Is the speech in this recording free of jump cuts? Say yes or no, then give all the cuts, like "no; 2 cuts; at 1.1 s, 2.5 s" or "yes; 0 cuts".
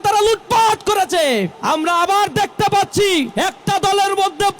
no; 2 cuts; at 1.5 s, 3.3 s